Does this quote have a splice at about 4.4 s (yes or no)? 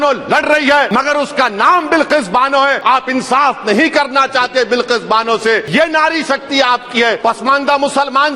no